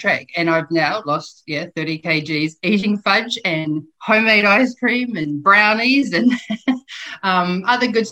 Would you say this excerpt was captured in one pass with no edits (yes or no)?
yes